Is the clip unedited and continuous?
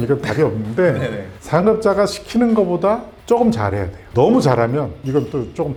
yes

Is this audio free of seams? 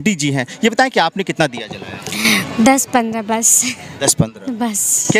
yes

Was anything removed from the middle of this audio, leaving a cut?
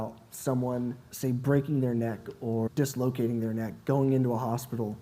yes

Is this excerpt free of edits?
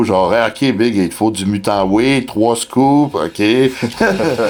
yes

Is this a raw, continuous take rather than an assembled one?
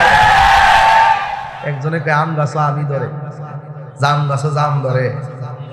no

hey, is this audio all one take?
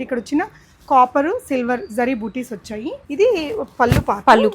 no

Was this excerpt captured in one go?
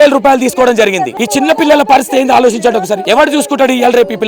no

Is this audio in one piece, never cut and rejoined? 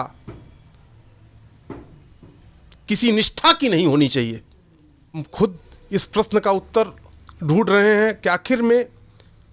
no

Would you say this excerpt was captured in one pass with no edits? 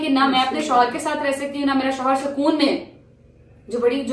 yes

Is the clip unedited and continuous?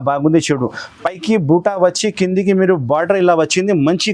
yes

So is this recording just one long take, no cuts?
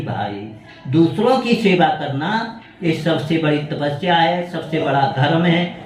yes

